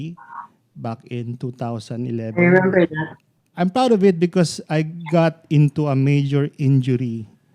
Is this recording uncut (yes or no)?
no